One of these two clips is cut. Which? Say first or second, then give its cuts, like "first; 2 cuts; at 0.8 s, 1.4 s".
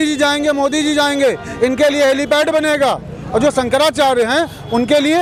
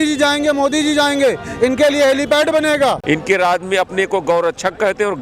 second; 1 cut; at 3.0 s